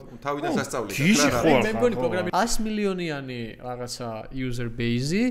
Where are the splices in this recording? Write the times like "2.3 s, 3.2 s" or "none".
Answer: 2.3 s